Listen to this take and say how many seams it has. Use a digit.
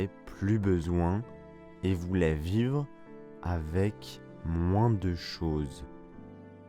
1